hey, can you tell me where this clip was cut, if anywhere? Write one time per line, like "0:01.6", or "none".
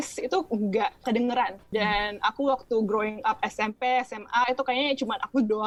none